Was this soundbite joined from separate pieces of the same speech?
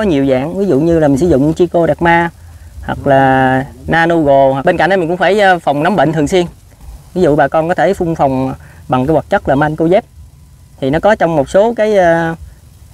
yes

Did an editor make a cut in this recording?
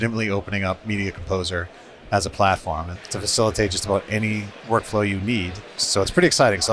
yes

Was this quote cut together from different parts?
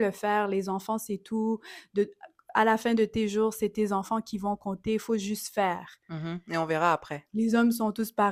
no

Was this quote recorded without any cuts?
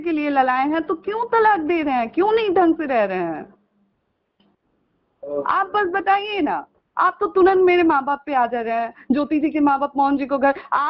yes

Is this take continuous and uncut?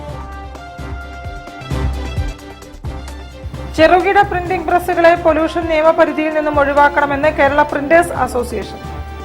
no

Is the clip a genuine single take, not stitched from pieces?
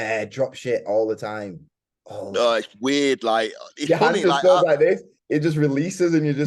yes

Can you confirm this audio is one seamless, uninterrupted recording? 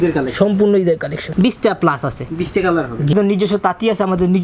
no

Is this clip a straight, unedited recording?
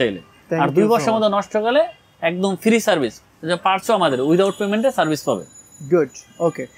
yes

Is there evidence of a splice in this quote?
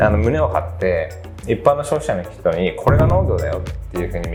no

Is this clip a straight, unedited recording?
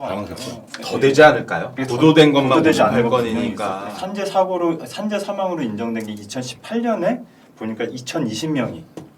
no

